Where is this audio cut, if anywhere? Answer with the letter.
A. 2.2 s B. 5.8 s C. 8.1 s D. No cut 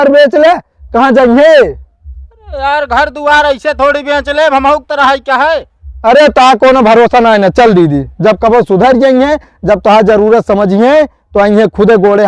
D